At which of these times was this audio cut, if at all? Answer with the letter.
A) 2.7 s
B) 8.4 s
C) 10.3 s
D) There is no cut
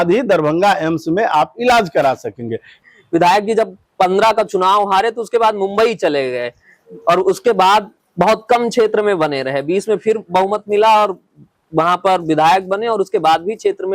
A